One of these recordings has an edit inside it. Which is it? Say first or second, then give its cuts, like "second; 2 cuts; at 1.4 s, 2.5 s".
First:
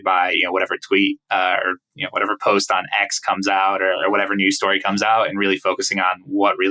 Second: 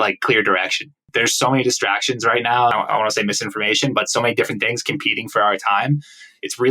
second; 2 cuts; at 1.1 s, 2.7 s